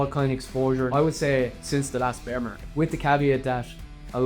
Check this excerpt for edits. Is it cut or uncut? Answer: cut